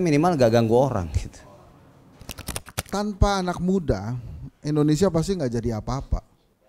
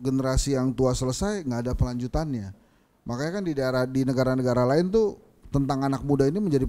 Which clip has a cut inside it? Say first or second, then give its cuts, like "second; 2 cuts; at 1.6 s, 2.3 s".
first; 1 cut; at 2.5 s